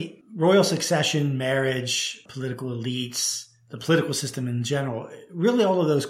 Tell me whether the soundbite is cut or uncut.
uncut